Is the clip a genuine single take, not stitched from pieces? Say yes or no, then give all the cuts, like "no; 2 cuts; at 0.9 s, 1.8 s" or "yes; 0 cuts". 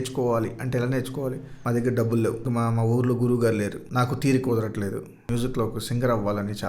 no; 4 cuts; at 1.5 s, 2.4 s, 3.8 s, 5.2 s